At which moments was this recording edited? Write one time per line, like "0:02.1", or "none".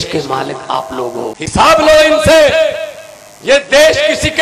0:01.4